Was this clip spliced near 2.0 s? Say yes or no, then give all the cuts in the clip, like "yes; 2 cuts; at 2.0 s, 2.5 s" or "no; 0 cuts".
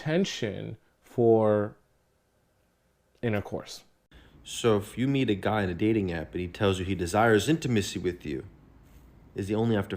no; 1 cut; at 3.9 s